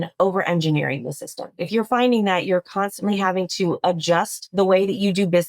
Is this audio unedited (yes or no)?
no